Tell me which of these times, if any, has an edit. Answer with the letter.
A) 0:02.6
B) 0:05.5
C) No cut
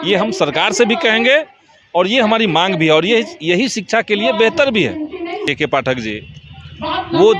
B